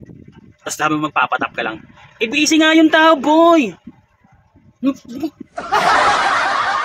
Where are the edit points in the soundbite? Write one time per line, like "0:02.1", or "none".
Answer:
0:05.5